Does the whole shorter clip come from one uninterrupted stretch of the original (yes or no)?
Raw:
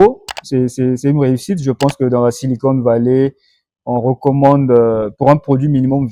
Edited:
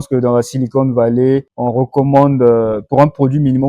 no